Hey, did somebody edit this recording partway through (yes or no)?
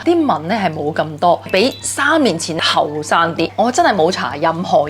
yes